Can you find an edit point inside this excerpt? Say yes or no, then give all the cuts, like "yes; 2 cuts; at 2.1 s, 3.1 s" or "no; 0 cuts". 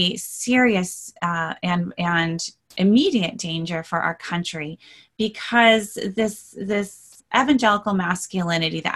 no; 0 cuts